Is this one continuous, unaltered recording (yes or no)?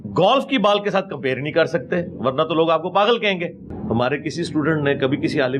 no